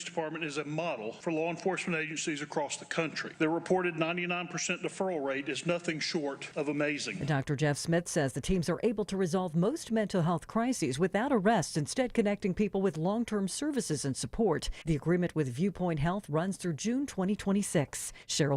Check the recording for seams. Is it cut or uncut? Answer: cut